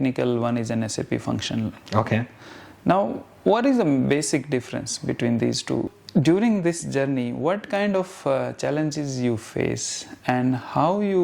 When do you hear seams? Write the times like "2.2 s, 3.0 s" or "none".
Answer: 6.0 s